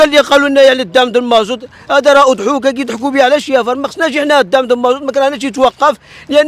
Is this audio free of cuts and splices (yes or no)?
yes